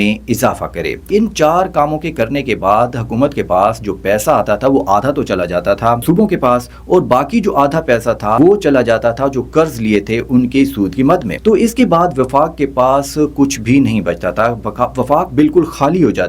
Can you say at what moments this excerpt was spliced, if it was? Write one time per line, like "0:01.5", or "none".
0:01.0
0:06.0
0:08.4
0:11.3